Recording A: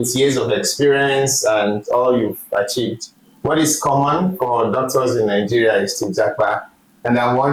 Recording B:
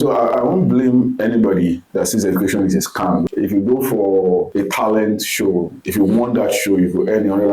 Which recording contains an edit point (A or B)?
B